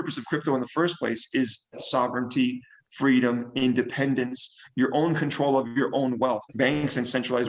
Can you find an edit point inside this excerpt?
yes; 2 cuts; at 1.8 s, 6.4 s

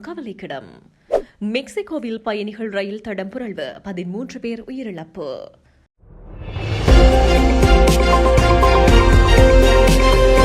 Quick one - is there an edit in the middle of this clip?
yes; 1 cut; at 5.6 s

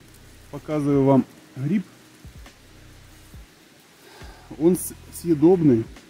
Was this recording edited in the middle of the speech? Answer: no; 0 cuts

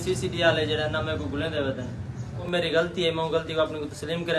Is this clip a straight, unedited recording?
no; 1 cut; at 2.4 s

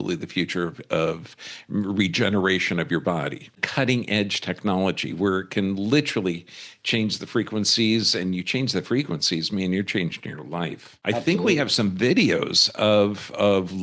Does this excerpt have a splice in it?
yes; 2 cuts; at 3.6 s, 10.9 s

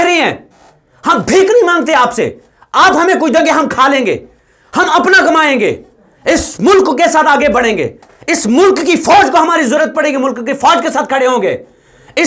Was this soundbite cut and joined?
no; 0 cuts

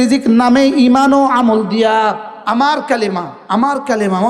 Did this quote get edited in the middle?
yes; 1 cut; at 2.3 s

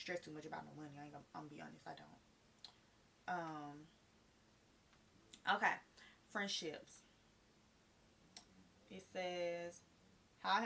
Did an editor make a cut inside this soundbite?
no; 0 cuts

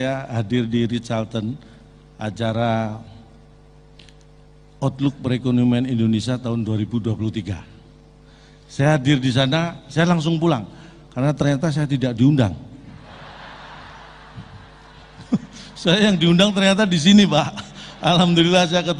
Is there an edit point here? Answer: no; 0 cuts

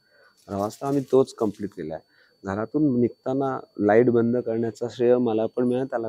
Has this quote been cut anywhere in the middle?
no; 0 cuts

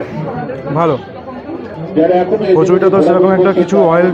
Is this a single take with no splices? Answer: no; 1 cut; at 1.7 s

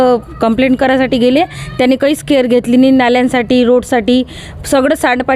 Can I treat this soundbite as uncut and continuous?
yes; 0 cuts

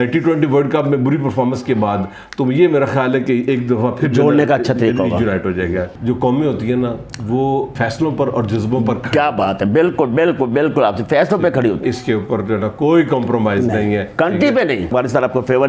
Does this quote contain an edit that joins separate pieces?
yes; 4 cuts; at 5.9 s, 7.7 s, 11.8 s, 14.9 s

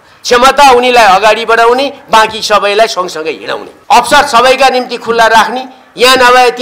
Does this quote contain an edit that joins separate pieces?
yes; 1 cut; at 3.7 s

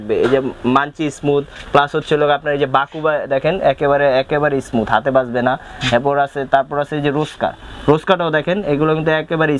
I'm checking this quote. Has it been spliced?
no; 0 cuts

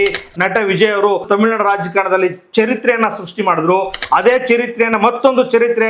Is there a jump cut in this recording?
yes; 1 cut; at 1.2 s

